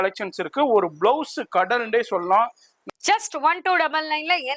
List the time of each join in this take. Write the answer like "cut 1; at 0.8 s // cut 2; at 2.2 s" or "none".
cut 1; at 2.7 s